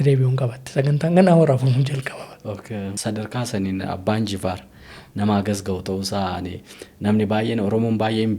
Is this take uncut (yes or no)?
no